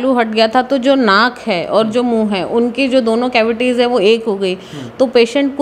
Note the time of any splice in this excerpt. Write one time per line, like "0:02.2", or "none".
none